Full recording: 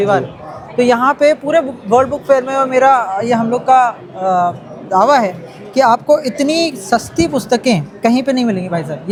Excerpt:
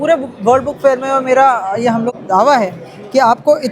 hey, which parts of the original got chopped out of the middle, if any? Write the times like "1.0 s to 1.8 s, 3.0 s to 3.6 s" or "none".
3.6 s to 4.7 s

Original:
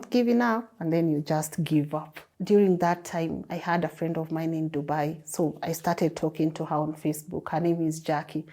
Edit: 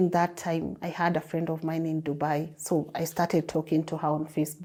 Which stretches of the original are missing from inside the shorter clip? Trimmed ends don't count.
none

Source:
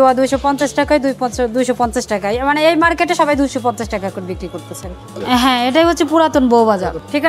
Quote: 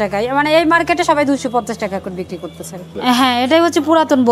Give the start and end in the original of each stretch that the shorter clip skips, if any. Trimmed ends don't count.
4.9 s to 5.1 s

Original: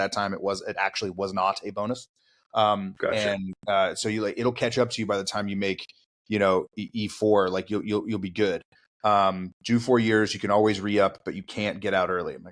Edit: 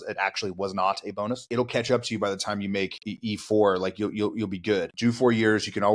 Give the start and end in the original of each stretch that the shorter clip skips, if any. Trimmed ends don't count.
2.1 s to 4.4 s, 5.9 s to 6.8 s, 8.6 s to 9.6 s

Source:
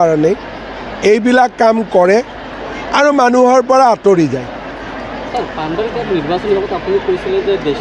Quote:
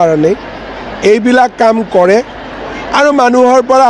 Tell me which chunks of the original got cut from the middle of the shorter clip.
none

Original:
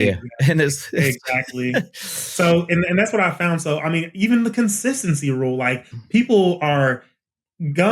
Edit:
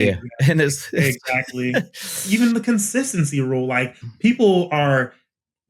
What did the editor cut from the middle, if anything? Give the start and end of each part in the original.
2.2 s to 4.1 s

